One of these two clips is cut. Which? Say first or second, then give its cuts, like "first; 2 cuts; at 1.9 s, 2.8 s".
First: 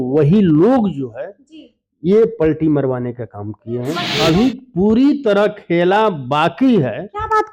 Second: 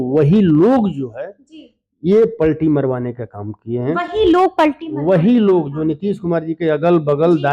first; 1 cut; at 4.1 s